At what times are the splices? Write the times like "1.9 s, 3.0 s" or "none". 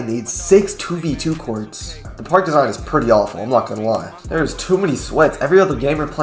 4.1 s

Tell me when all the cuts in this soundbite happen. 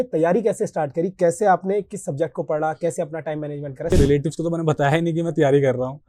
3.9 s

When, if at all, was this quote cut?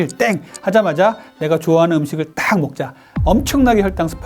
3.1 s

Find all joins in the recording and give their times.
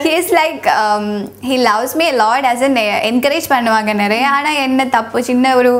none

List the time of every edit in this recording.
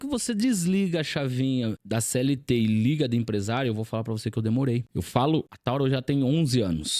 1.8 s, 4.9 s, 5.5 s

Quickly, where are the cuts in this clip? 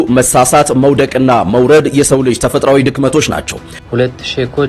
3.7 s

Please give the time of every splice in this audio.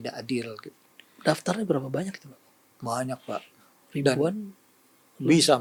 none

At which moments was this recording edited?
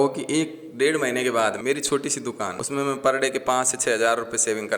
1.6 s, 2.6 s

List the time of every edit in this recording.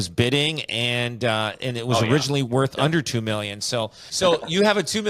4.0 s

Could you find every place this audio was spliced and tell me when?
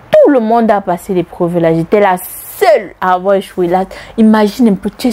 none

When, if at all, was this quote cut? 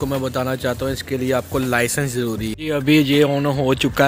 2.5 s

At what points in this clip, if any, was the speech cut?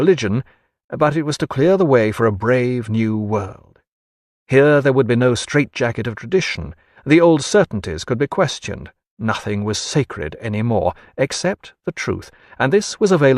12.4 s

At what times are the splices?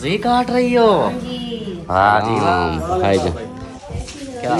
2.4 s

